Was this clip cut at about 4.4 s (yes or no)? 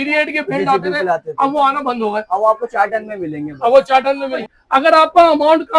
yes